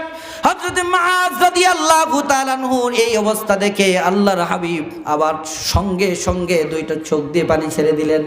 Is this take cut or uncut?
cut